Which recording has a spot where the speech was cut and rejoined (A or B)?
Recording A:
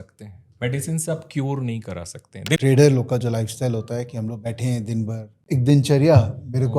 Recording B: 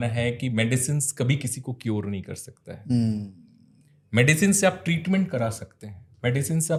A